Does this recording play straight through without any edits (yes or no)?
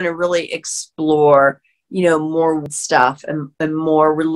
no